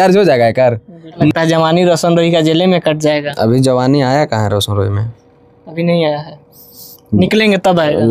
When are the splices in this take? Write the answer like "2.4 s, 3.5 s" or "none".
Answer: 1.3 s